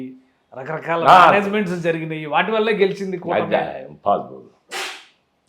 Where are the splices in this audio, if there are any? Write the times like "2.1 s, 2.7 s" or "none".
none